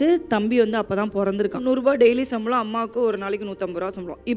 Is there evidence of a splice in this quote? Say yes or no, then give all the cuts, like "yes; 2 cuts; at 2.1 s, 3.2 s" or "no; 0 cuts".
yes; 1 cut; at 1.6 s